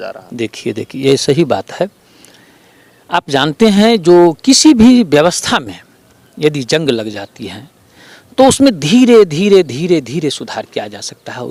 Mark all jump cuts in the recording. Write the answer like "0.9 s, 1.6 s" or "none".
none